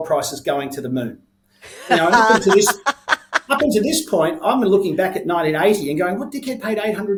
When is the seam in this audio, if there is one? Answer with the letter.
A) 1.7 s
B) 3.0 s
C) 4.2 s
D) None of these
D